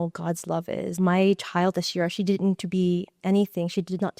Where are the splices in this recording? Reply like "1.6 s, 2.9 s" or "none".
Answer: 0.9 s